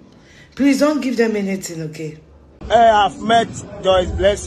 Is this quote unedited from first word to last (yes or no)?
no